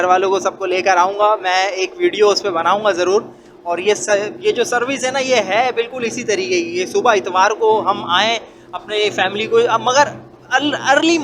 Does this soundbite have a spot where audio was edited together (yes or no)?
no